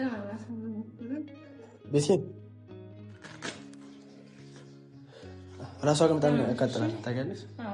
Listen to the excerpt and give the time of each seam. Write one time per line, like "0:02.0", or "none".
0:02.4
0:05.6